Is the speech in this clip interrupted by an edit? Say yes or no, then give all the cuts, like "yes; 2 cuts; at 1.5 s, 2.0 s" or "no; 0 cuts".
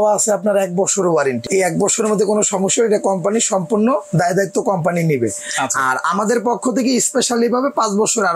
yes; 1 cut; at 1.4 s